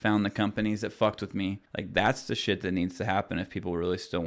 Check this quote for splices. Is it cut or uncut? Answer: cut